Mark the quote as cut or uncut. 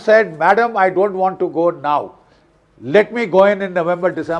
uncut